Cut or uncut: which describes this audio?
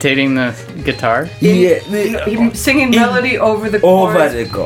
uncut